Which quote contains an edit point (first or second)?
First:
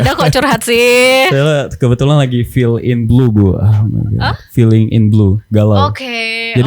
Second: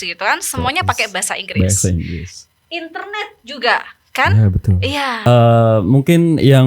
second